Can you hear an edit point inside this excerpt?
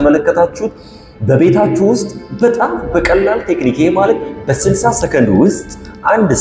no; 0 cuts

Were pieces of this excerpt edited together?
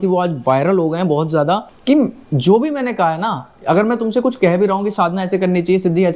yes; 1 cut; at 1.7 s

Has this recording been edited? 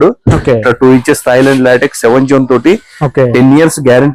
no; 0 cuts

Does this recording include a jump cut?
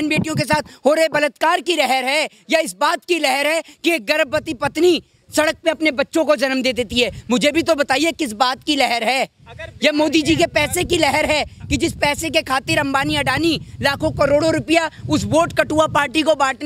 no; 0 cuts

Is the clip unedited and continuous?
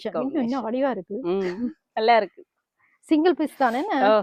yes; 0 cuts

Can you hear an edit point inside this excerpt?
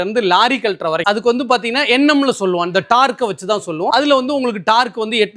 no; 0 cuts

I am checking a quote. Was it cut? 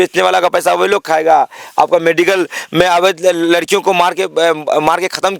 no; 0 cuts

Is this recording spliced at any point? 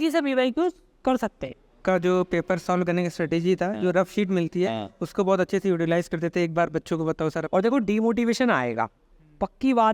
yes; 2 cuts; at 1.8 s, 7.5 s

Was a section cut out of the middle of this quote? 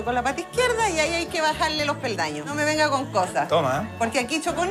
yes; 1 cut; at 2.4 s

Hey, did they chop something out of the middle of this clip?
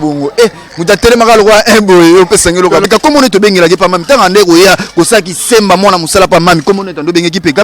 yes; 1 cut; at 2.8 s

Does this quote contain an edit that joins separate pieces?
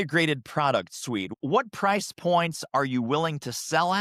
yes; 1 cut; at 1.3 s

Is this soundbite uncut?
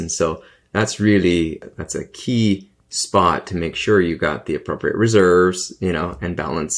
no; 1 cut; at 1.7 s

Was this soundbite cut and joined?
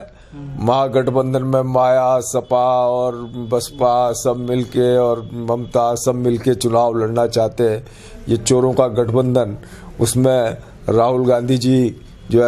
no; 0 cuts

